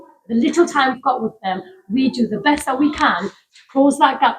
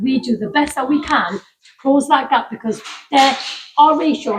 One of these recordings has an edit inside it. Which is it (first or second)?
first